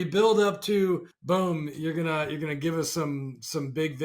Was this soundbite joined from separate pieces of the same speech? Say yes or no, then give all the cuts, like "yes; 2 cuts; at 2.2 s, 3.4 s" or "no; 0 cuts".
yes; 1 cut; at 1.1 s